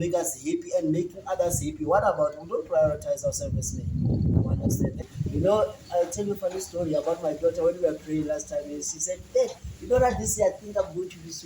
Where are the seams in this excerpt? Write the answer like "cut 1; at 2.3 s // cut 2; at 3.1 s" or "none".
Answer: cut 1; at 5.0 s